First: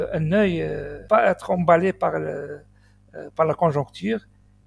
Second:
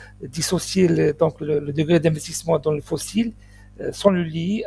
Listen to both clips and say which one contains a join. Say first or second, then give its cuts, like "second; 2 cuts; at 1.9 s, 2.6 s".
first; 1 cut; at 0.9 s